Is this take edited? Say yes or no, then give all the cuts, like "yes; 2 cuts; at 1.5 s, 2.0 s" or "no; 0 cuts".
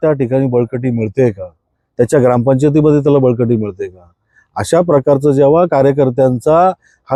no; 0 cuts